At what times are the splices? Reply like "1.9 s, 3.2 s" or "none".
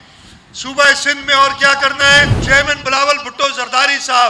2.4 s